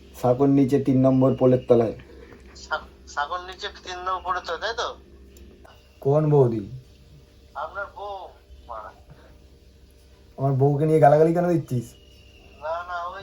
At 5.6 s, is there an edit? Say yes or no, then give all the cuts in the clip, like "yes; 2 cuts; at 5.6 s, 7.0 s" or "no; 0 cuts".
yes; 1 cut; at 5.6 s